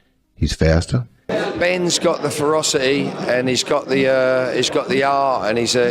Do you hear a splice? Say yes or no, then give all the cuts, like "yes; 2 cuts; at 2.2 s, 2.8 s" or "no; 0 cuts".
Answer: yes; 1 cut; at 1.2 s